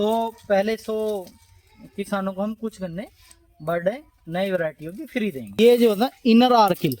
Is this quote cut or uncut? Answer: cut